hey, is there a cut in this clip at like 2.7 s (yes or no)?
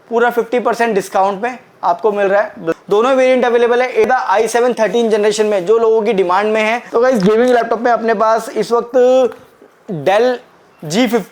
yes